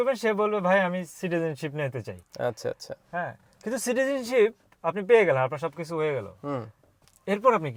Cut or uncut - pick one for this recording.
uncut